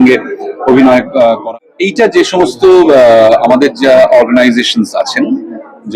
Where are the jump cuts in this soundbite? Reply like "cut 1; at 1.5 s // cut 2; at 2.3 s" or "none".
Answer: cut 1; at 1.4 s